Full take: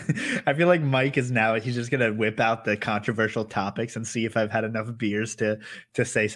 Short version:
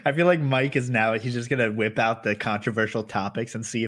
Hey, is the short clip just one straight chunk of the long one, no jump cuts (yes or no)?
yes